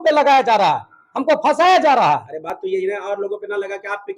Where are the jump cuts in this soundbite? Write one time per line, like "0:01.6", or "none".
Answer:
none